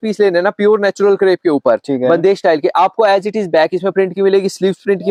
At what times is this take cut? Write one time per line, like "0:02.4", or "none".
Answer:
none